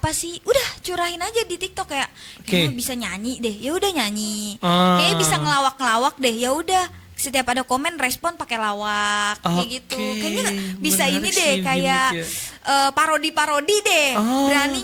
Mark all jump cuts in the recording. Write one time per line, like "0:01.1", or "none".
none